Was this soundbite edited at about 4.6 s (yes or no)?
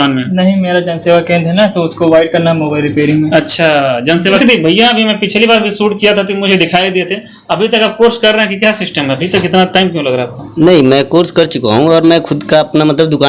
yes